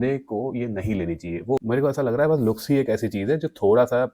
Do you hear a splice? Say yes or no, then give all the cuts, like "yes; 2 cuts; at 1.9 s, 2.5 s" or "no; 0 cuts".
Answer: yes; 1 cut; at 1.6 s